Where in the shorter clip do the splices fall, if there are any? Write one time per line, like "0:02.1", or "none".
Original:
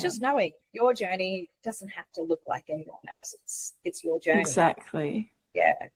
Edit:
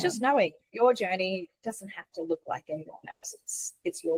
none